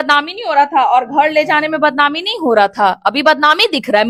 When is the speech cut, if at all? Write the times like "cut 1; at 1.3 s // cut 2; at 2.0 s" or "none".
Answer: none